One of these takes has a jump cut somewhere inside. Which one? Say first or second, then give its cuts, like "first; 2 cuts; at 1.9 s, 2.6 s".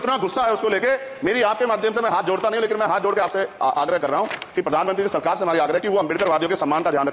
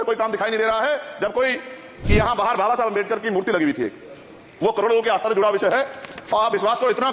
second; 1 cut; at 1.9 s